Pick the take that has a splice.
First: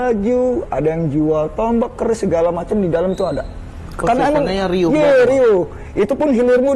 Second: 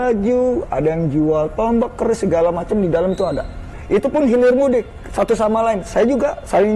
second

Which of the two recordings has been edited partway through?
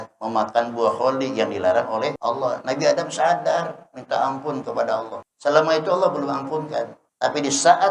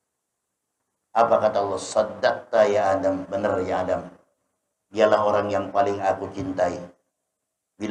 first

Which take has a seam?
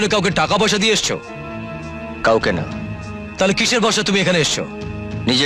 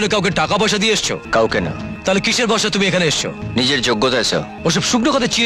second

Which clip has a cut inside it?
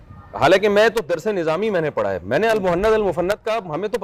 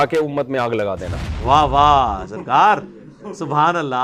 second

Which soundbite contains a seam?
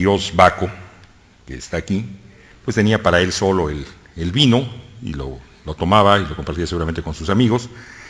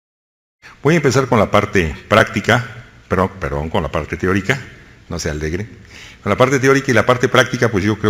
first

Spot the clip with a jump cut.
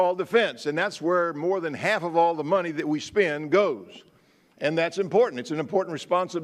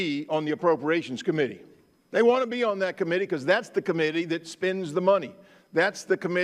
first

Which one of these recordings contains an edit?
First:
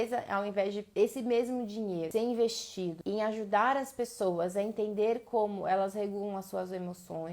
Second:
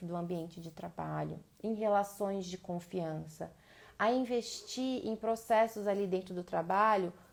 first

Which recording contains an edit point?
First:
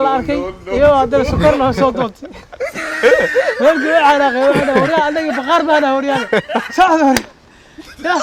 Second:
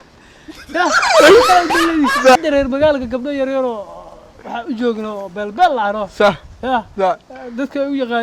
second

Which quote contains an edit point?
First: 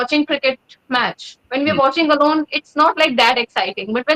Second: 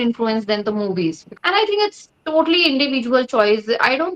second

